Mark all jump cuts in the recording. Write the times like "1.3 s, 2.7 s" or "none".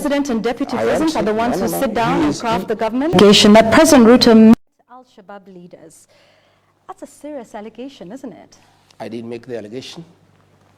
3.1 s